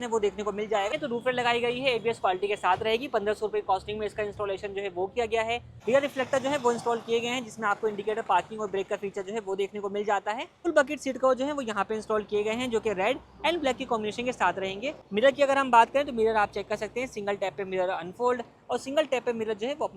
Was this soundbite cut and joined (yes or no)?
yes